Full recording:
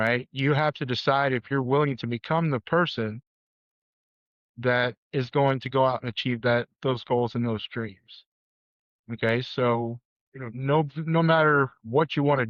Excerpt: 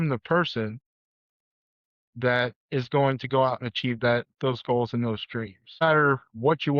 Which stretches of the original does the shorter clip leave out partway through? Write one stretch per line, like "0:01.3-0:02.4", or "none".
0:08.2-0:11.3